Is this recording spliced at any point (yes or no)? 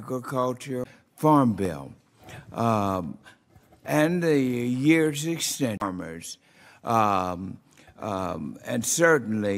no